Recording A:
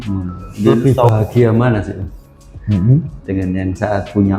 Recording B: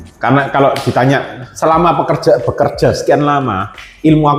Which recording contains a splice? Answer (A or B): A